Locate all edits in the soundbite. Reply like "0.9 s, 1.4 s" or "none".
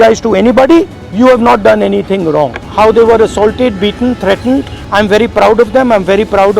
1.0 s, 2.6 s, 4.8 s

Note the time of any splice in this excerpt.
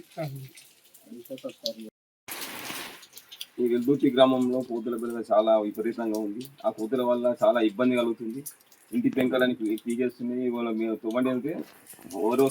1.9 s

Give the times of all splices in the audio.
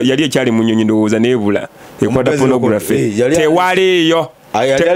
none

